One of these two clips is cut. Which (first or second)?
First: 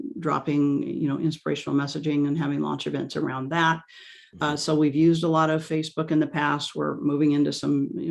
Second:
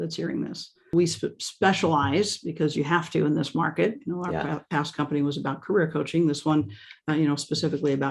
second